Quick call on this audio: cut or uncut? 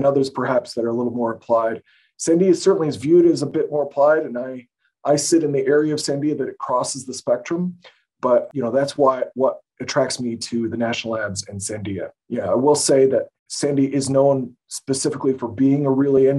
cut